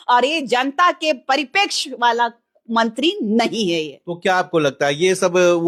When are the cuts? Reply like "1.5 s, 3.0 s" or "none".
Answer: none

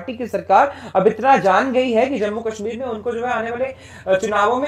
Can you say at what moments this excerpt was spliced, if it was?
none

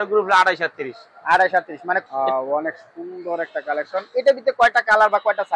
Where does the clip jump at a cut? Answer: 2.0 s

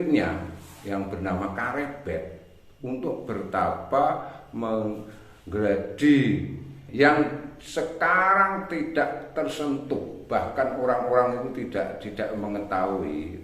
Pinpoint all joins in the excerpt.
6.8 s

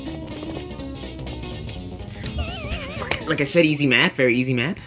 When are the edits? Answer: none

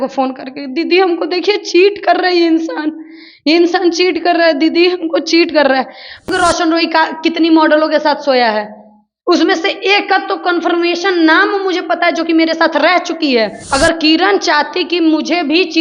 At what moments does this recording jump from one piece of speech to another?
6.2 s, 13.6 s

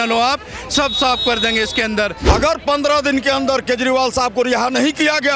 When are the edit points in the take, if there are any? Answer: 2.2 s

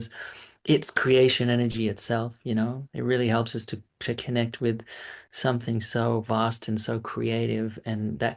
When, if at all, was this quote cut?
none

